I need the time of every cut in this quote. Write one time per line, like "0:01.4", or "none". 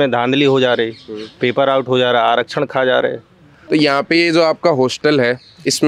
0:03.6